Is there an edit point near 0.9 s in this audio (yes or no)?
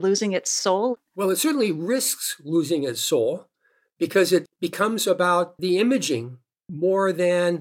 yes